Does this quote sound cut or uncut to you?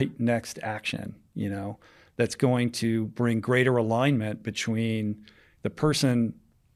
uncut